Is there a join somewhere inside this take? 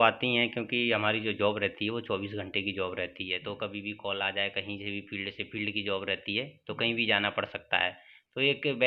no; 0 cuts

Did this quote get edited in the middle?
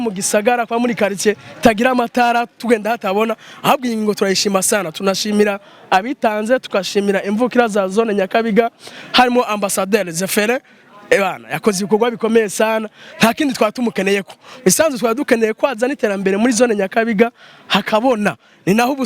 no; 0 cuts

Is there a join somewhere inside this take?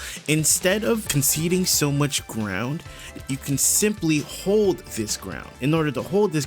yes; 3 cuts; at 1.1 s, 3.1 s, 5.4 s

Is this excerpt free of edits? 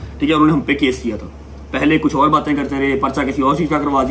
yes; 0 cuts

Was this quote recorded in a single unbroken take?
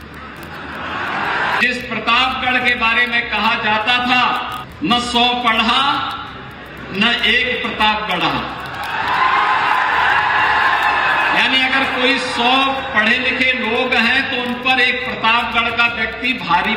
no; 2 cuts; at 1.6 s, 4.6 s

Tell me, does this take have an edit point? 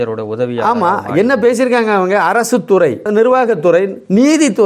no; 0 cuts

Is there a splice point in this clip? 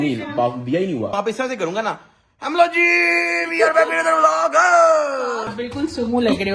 yes; 2 cuts; at 1.1 s, 5.4 s

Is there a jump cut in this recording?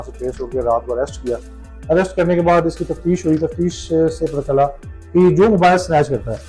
no; 0 cuts

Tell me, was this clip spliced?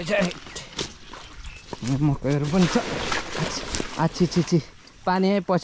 no; 0 cuts

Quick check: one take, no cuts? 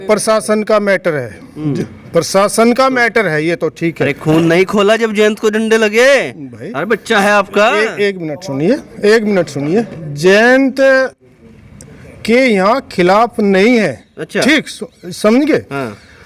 yes; 0 cuts

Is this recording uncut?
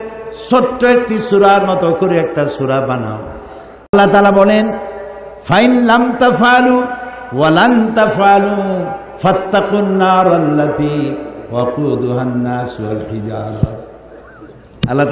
no; 1 cut; at 3.9 s

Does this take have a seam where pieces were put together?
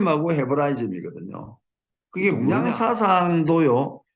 yes; 1 cut; at 2.6 s

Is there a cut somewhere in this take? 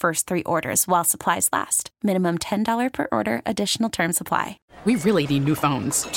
yes; 1 cut; at 4.6 s

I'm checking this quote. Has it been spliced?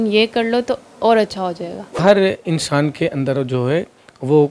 yes; 1 cut; at 2.0 s

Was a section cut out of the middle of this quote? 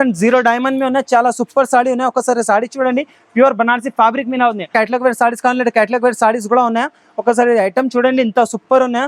yes; 1 cut; at 4.7 s

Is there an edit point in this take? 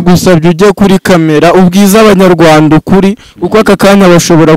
no; 0 cuts

